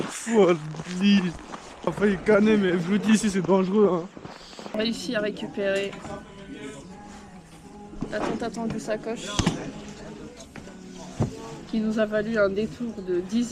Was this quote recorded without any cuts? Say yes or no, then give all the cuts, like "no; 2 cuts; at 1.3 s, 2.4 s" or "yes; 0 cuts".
no; 2 cuts; at 1.9 s, 4.8 s